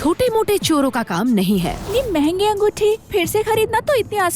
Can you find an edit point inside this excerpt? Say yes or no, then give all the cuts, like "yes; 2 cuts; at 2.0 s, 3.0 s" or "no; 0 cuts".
yes; 1 cut; at 1.9 s